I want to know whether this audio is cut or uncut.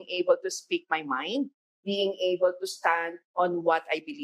cut